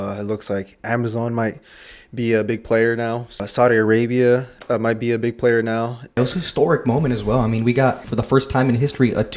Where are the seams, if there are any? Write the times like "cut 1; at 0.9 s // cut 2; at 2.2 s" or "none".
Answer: cut 1; at 3.4 s // cut 2; at 6.2 s // cut 3; at 8.1 s